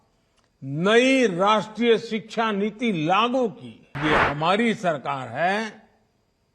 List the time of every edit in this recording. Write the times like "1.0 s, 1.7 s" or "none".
4.0 s